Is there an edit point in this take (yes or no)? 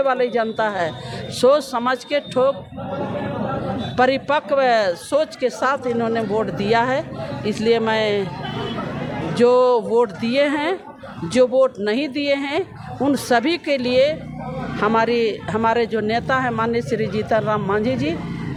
no